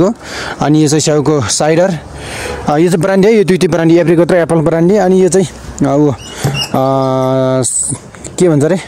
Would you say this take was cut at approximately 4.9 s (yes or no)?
no